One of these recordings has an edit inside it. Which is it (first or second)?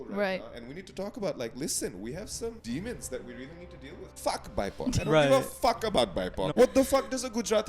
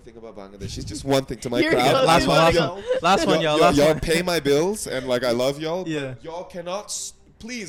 first